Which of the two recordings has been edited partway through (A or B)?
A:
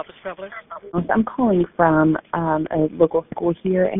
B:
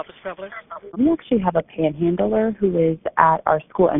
B